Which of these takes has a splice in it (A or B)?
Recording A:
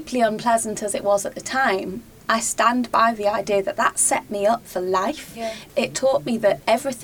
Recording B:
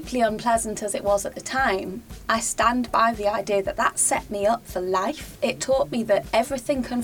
B